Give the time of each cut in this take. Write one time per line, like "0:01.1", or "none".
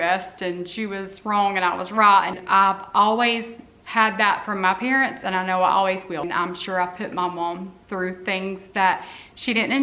0:02.4
0:06.3